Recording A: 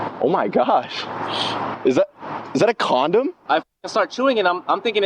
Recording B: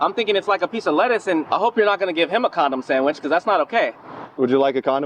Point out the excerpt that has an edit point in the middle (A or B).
B